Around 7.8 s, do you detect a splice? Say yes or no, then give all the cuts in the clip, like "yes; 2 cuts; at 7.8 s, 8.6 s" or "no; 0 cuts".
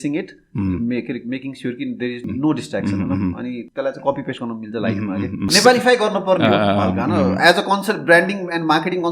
no; 3 cuts; at 2.2 s, 3.6 s, 5.5 s